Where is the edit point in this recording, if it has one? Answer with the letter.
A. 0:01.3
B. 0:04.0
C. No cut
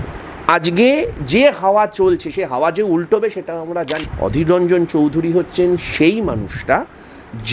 B